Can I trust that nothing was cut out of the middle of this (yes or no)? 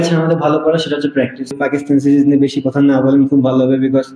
no